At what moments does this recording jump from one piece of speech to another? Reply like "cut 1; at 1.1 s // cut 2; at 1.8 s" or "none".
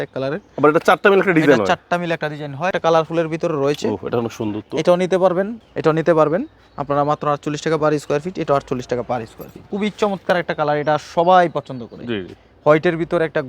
cut 1; at 2.7 s // cut 2; at 5.6 s // cut 3; at 9.6 s